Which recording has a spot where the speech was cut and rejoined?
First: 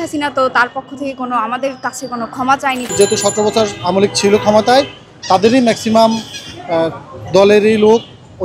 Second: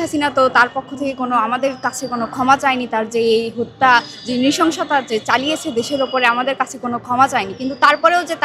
first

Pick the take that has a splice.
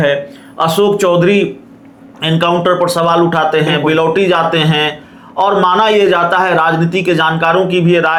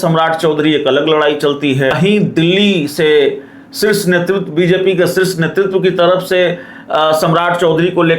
second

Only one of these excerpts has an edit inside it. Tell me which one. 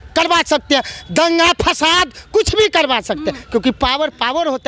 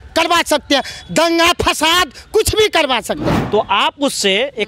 second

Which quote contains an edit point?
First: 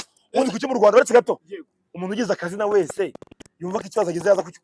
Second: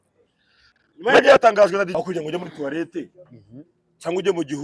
second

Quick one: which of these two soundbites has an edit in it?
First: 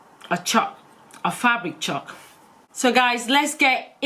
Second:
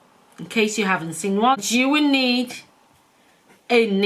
second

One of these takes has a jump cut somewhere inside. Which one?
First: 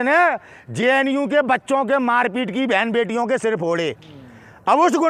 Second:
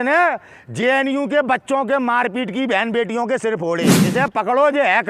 second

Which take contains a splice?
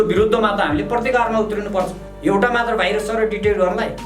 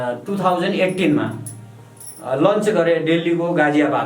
first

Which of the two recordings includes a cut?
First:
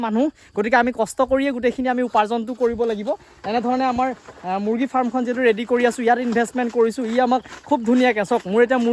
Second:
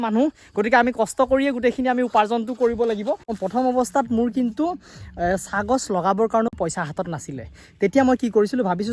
second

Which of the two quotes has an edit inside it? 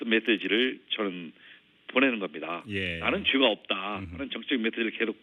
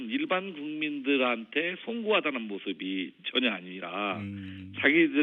second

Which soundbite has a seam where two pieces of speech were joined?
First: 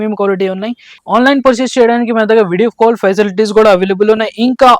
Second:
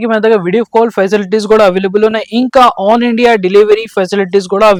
first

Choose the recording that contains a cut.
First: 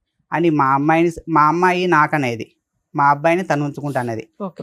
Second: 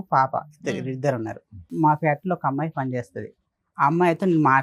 second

